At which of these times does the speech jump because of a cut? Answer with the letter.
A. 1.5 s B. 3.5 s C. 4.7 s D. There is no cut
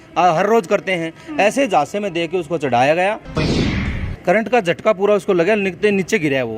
B